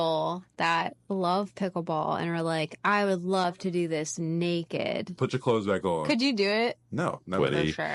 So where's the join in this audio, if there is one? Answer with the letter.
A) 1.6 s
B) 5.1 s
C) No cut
B